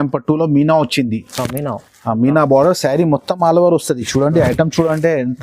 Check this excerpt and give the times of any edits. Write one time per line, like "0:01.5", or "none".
none